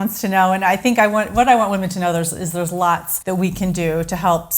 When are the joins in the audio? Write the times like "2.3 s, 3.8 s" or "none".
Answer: 3.1 s